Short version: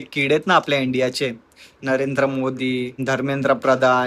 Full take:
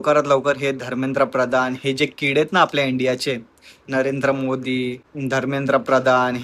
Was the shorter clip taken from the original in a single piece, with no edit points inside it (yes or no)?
no